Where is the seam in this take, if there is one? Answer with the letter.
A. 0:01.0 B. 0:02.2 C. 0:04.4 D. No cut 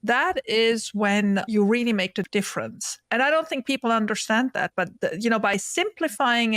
B